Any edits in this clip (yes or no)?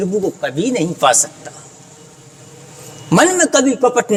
no